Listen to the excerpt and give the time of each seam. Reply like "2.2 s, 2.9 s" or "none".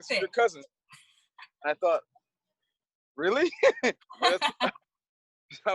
none